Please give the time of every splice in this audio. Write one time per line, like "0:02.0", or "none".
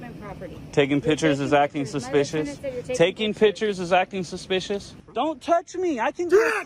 0:04.8